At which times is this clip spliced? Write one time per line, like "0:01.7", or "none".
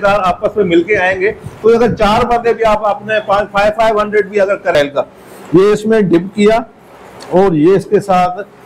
0:04.7